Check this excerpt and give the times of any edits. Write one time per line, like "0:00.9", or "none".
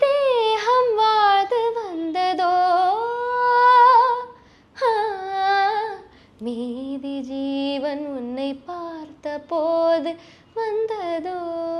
none